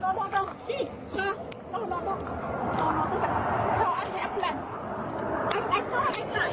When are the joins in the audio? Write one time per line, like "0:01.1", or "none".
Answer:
none